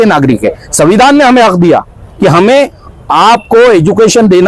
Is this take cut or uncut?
uncut